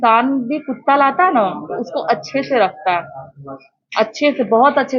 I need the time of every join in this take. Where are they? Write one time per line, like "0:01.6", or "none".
none